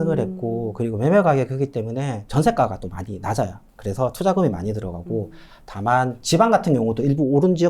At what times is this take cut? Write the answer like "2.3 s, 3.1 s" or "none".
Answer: 2.2 s, 3.7 s

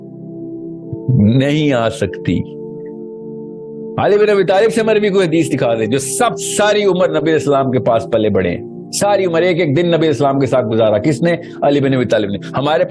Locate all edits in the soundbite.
1.1 s

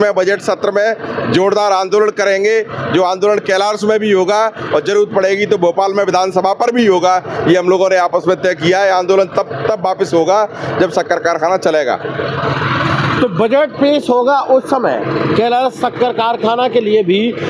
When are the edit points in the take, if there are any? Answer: none

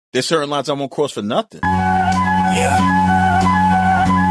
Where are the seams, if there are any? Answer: 1.6 s

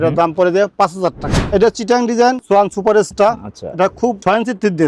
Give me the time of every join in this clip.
1.3 s

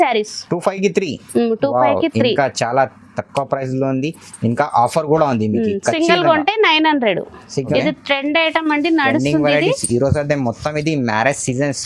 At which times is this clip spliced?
7.7 s

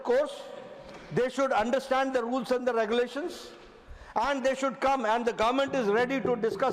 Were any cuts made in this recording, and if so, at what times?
none

